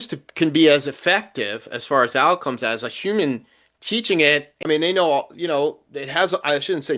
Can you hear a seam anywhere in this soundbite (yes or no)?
yes